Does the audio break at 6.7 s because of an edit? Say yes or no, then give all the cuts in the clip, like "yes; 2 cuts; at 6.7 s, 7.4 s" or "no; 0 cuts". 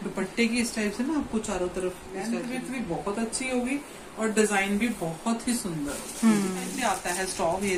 yes; 2 cuts; at 2.1 s, 6.7 s